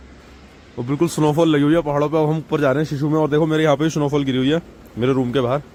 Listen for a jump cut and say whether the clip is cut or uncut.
uncut